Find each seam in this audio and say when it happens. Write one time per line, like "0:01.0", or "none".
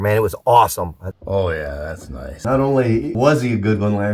0:01.1
0:02.3
0:03.1